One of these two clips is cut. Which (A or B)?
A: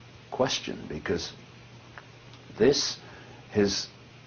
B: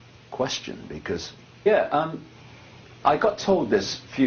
A